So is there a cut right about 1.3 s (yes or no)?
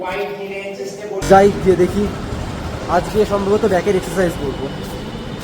yes